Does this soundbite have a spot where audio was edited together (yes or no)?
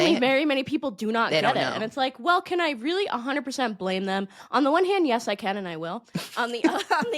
no